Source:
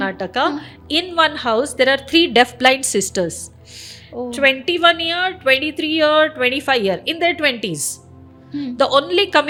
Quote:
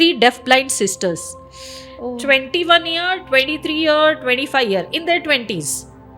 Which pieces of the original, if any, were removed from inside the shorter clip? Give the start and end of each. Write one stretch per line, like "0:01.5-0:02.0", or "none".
none

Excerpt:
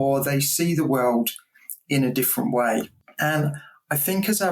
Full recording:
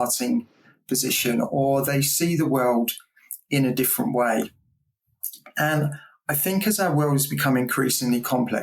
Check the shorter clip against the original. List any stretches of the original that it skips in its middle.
0:04.6-0:05.4

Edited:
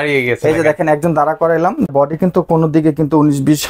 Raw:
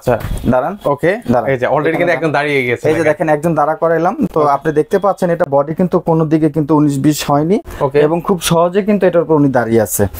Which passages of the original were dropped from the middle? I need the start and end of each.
0:04.3-0:05.5

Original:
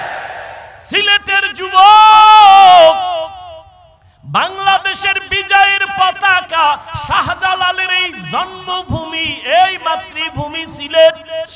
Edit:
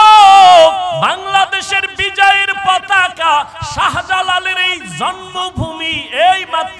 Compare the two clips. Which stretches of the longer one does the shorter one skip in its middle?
0:03.2-0:04.3

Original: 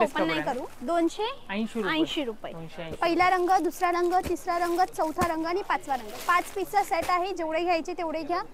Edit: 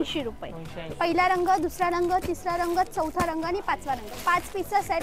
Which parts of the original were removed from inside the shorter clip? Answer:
none

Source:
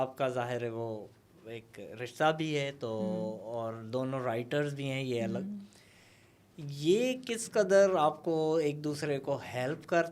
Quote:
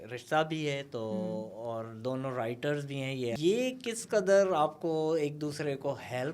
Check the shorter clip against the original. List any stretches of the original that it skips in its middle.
0:05.3-0:06.8

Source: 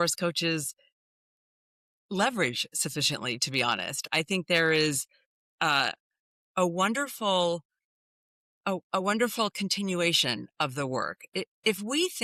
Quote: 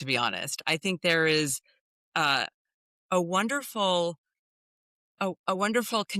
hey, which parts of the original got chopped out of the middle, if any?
none

